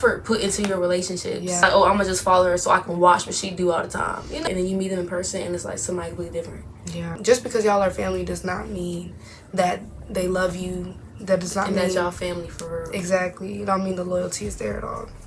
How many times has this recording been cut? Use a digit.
3